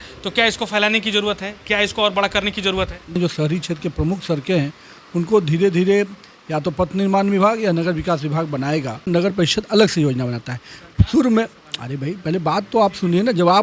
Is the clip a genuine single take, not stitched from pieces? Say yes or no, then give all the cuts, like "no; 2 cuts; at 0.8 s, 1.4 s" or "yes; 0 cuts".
no; 2 cuts; at 3.2 s, 9.1 s